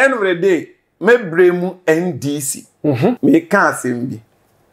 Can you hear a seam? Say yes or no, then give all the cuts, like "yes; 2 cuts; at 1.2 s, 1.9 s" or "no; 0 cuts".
yes; 1 cut; at 3.2 s